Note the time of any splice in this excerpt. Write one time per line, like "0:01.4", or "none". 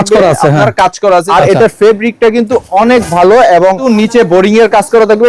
0:01.3
0:03.8